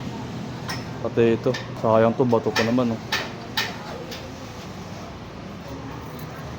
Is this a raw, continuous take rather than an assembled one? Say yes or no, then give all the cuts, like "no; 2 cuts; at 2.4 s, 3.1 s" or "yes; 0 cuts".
no; 2 cuts; at 1.7 s, 5.7 s